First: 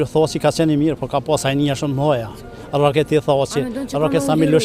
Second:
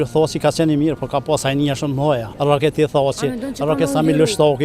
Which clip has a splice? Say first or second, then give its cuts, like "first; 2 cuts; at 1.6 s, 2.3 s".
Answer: second; 1 cut; at 2.3 s